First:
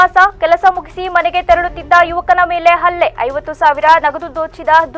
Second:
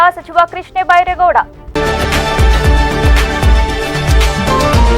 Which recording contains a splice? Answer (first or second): second